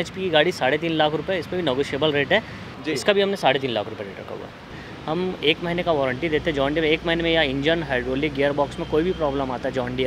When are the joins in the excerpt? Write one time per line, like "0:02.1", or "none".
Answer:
0:02.7
0:04.8